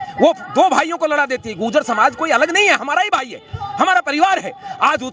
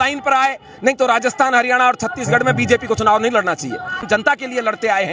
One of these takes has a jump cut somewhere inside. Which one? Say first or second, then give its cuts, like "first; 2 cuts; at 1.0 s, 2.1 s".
second; 1 cut; at 4.0 s